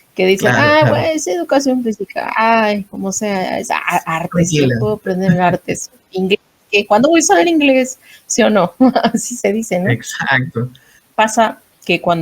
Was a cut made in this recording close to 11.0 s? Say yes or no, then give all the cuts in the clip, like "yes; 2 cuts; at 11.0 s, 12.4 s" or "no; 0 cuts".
yes; 1 cut; at 11.0 s